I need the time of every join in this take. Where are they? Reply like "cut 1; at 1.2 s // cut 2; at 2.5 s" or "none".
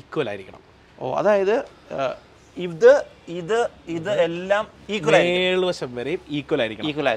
none